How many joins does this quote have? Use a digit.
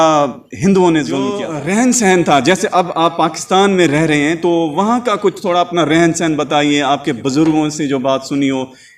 1